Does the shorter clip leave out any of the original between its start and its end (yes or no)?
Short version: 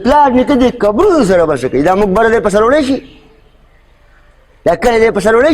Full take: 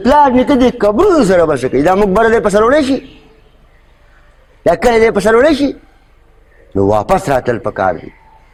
no